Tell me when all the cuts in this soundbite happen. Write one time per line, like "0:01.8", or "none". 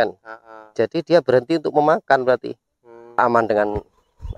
0:03.2